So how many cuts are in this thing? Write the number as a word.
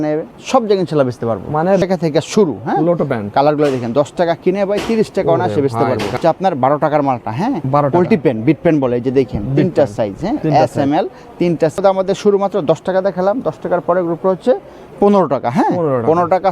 three